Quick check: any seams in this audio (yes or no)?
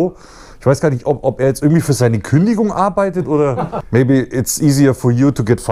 yes